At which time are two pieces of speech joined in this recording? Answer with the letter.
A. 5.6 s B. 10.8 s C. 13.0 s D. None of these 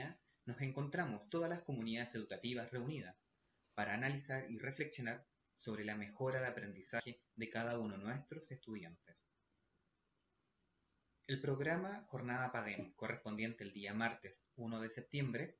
B